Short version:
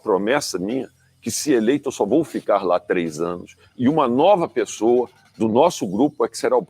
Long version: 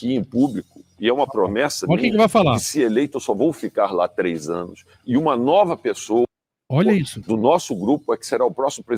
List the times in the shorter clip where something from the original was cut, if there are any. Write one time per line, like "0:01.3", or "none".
0:05.3

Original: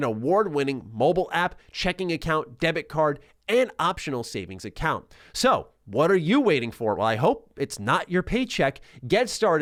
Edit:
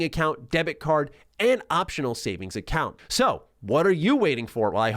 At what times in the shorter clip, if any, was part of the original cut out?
0:03.0

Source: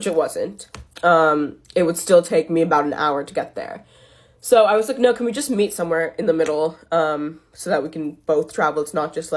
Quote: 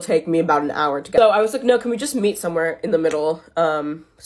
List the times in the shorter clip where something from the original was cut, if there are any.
0:01.1

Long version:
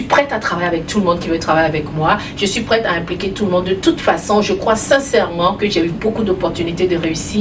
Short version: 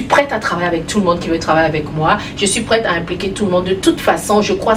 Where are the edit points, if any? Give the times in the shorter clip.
none

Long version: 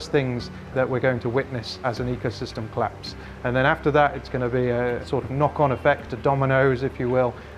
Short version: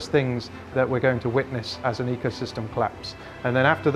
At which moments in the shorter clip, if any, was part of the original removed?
none

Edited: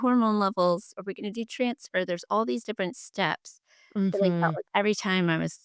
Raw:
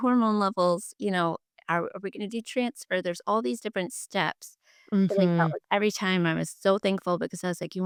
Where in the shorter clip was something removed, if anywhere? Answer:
0:00.9

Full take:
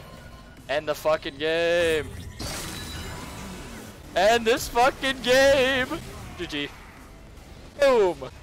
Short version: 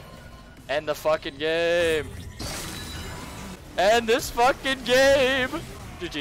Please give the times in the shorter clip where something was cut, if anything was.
0:03.6

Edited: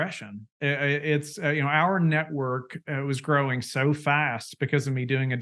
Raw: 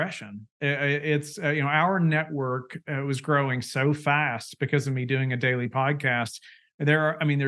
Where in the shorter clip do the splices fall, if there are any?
none

